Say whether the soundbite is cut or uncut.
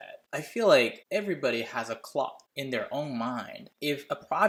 uncut